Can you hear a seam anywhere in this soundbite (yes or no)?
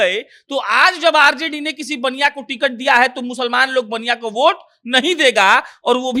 no